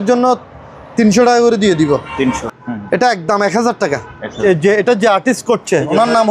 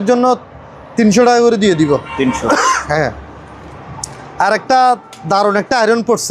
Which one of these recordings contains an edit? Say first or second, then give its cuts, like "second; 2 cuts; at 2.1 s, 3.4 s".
first; 2 cuts; at 2.4 s, 4.4 s